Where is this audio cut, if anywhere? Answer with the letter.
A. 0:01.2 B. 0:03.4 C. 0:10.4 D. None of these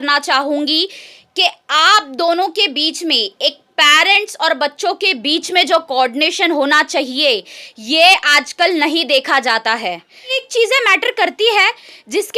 C